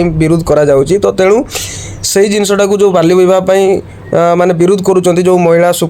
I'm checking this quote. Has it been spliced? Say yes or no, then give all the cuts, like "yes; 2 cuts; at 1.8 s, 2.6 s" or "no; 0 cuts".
no; 0 cuts